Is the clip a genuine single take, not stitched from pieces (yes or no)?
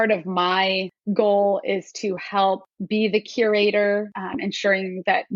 no